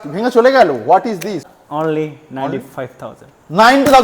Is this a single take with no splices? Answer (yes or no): no